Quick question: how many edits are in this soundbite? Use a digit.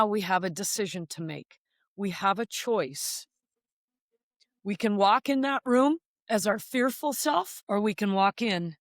1